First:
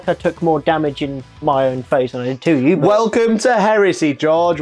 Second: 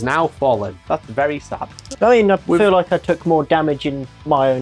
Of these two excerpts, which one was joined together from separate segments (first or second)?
second